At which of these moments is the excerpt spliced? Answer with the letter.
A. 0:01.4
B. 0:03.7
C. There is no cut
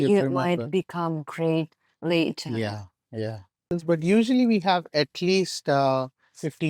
B